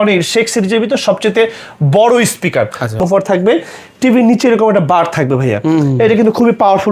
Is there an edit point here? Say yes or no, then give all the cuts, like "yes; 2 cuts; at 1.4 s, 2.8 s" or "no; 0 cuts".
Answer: yes; 1 cut; at 3.0 s